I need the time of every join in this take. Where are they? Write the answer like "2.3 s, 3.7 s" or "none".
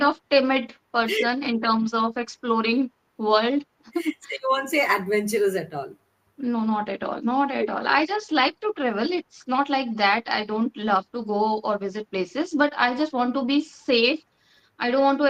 none